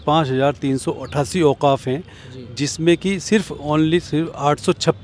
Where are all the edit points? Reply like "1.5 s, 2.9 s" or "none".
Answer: none